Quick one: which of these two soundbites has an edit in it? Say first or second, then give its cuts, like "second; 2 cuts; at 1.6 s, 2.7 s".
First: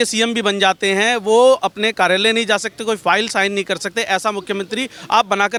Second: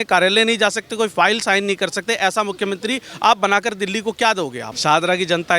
second; 1 cut; at 4.6 s